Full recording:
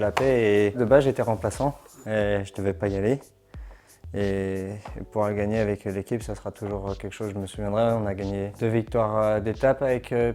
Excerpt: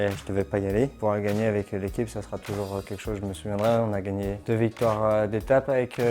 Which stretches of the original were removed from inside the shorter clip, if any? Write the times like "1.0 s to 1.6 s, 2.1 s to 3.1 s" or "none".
3.2 s to 5.1 s